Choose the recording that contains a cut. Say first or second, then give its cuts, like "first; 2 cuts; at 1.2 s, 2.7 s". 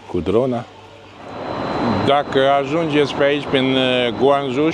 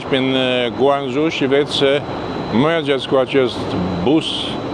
first; 1 cut; at 1.6 s